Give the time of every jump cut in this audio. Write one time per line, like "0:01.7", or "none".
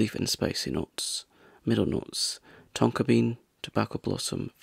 none

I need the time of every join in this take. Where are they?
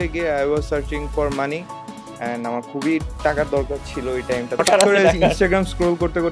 0:04.6

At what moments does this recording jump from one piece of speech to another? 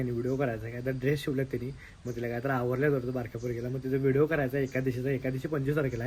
none

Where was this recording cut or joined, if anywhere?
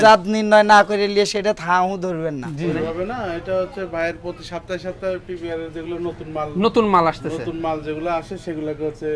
0:02.7

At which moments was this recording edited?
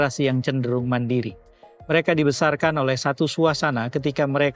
none

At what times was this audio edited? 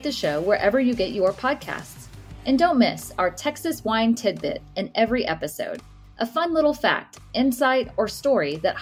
none

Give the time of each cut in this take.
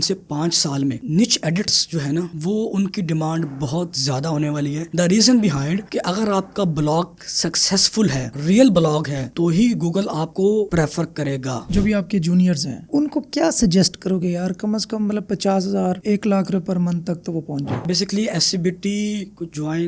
0:11.6
0:17.8

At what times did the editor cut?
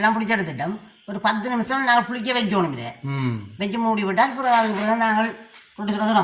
none

